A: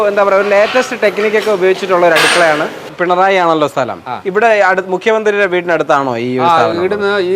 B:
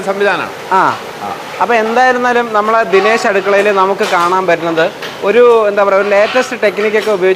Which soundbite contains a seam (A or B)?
A